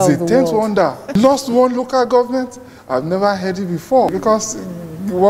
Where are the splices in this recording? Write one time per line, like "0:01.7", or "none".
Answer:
0:01.1
0:04.2